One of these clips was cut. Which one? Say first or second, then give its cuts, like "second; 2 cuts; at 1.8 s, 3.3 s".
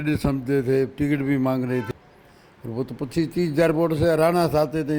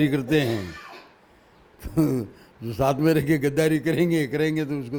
first; 1 cut; at 1.9 s